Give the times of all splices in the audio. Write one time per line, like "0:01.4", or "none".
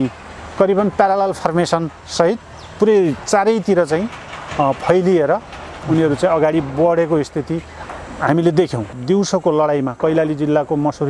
0:08.9